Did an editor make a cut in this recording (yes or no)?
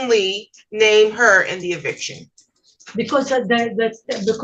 no